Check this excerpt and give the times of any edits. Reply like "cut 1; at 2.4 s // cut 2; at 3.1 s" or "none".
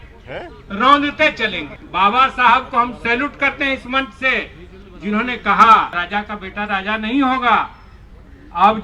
cut 1; at 1.7 s // cut 2; at 6.0 s